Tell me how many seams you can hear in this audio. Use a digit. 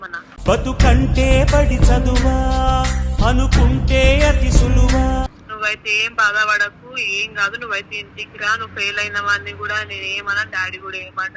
1